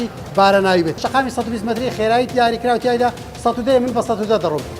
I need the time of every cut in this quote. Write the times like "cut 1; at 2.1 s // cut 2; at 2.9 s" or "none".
cut 1; at 1.0 s

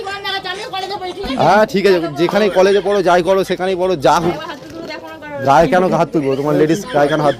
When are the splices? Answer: cut 1; at 4.4 s

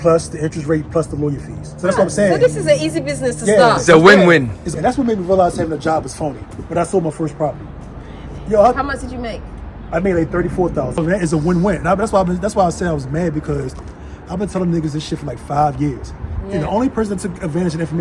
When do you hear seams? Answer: cut 1; at 4.6 s // cut 2; at 11.0 s

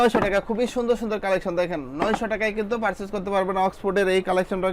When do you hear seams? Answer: none

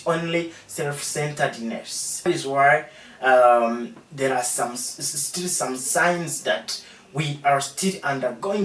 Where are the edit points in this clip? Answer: cut 1; at 2.3 s

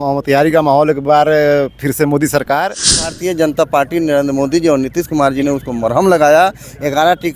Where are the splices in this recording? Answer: cut 1; at 3.0 s

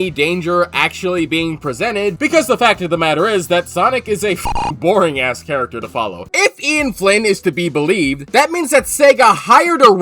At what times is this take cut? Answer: cut 1; at 2.2 s // cut 2; at 6.2 s

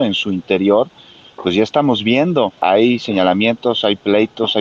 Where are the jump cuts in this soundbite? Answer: cut 1; at 2.5 s

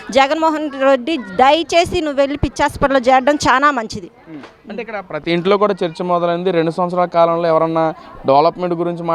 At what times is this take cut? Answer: none

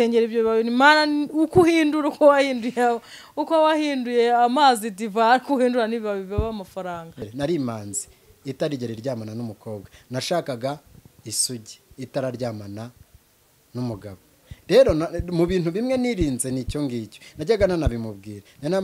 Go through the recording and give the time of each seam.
cut 1; at 7.2 s

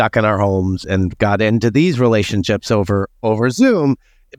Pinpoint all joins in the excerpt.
none

